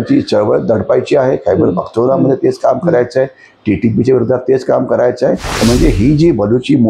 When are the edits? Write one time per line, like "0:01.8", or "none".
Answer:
0:05.5